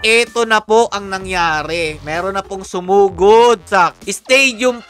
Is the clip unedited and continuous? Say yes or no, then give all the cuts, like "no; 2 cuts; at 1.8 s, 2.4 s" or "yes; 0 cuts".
no; 1 cut; at 3.7 s